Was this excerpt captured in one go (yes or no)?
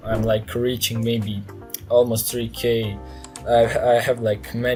yes